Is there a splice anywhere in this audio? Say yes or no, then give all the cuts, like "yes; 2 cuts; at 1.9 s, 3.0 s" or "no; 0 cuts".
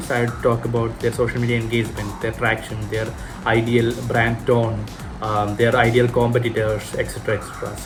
no; 0 cuts